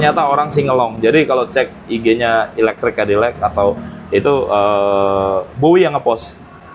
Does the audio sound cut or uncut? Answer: uncut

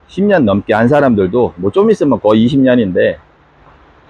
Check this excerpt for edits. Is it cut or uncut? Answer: uncut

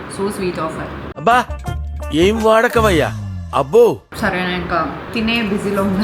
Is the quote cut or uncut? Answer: cut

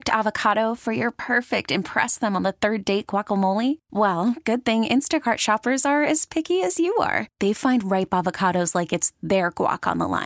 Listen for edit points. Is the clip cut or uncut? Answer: uncut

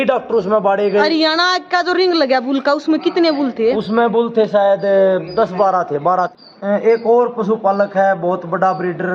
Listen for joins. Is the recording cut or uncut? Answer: cut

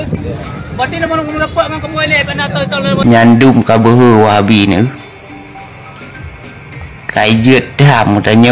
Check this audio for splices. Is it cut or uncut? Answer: cut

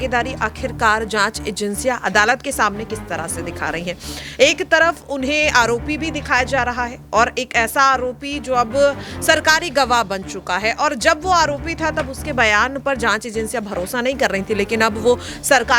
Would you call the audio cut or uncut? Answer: uncut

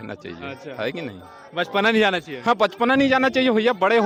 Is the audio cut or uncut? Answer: uncut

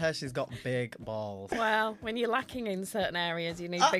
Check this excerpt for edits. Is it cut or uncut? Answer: cut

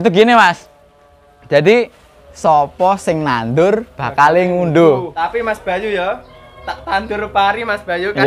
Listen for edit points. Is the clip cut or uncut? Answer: cut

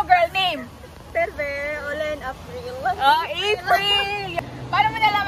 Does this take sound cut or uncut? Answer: cut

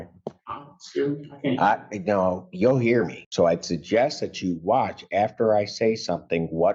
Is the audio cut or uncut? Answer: cut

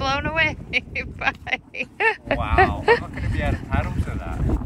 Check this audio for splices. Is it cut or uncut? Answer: uncut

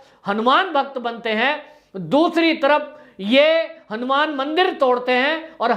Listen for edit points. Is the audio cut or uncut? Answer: uncut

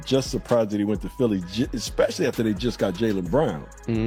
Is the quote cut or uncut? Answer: uncut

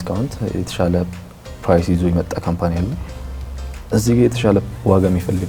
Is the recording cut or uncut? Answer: uncut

